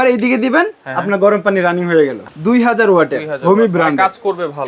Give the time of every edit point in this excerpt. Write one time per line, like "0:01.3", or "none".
0:02.2